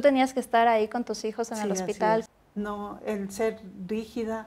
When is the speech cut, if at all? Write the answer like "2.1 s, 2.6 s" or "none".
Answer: 2.2 s